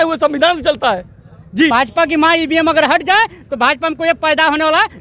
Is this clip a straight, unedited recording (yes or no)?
no